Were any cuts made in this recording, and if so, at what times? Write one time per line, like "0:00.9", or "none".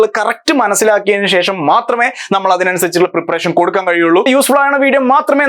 0:04.3